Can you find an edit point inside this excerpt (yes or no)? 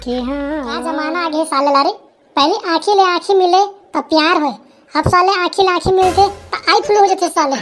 yes